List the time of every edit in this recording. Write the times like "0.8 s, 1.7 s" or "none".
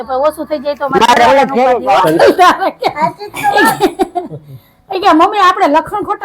2.0 s